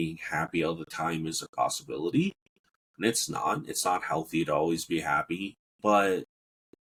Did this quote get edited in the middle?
no; 0 cuts

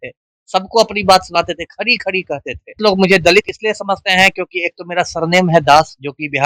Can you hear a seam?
yes; 1 cut; at 2.8 s

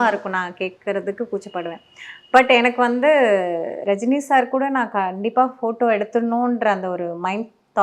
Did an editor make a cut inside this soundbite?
no; 0 cuts

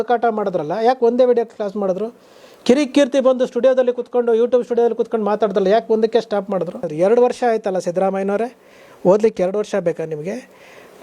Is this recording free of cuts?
no; 1 cut; at 6.8 s

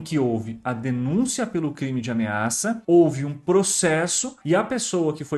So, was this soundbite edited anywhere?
yes; 2 cuts; at 2.8 s, 4.3 s

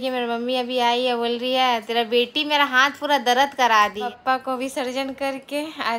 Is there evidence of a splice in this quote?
yes; 1 cut; at 4.1 s

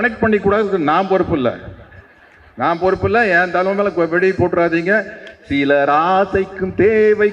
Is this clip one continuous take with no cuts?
yes; 0 cuts

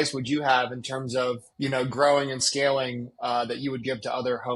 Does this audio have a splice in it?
yes; 1 cut; at 1.5 s

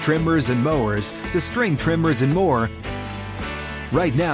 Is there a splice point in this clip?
no; 0 cuts

